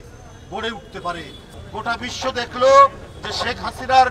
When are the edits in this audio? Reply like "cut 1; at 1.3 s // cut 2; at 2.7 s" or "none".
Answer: cut 1; at 1.4 s